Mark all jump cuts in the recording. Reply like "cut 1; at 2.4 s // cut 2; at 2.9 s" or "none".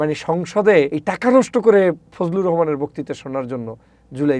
cut 1; at 1.0 s